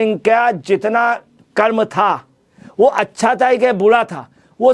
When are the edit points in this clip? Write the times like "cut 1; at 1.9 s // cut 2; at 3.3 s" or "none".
none